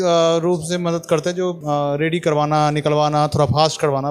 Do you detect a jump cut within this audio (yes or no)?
yes